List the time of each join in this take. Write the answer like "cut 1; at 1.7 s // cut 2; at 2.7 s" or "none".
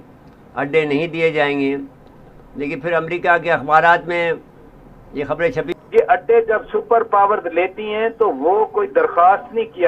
cut 1; at 5.7 s